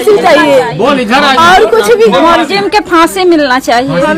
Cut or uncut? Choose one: uncut